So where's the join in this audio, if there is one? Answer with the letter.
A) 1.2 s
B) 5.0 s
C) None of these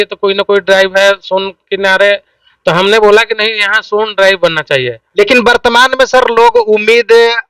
B